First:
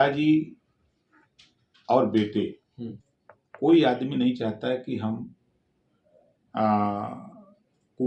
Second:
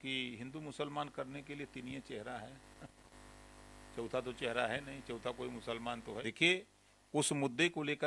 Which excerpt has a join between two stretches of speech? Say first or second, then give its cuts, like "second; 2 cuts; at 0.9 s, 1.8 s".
second; 1 cut; at 6.2 s